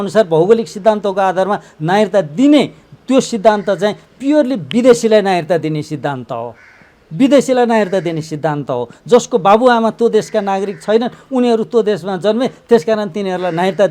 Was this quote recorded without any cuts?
yes; 0 cuts

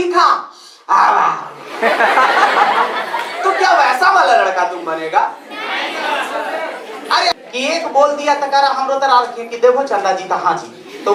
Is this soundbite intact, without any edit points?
no; 1 cut; at 7.3 s

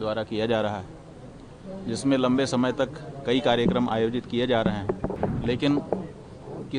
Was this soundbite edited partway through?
yes; 1 cut; at 5.1 s

